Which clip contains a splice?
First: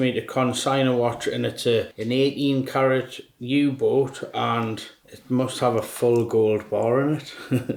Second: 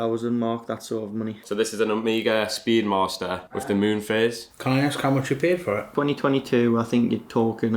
second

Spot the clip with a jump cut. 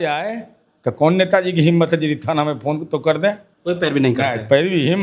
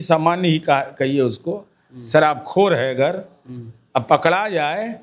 first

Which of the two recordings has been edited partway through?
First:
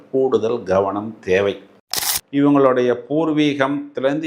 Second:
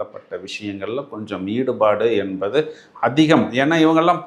first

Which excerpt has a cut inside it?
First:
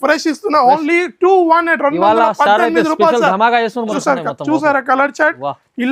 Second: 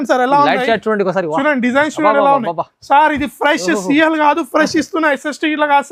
first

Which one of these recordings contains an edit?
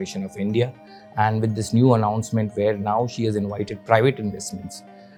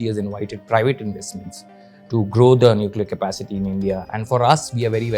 second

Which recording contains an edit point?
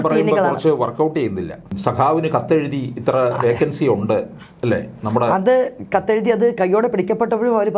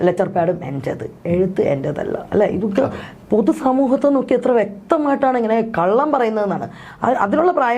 first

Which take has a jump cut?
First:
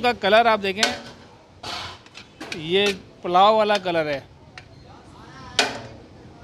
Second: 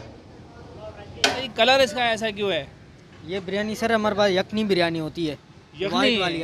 second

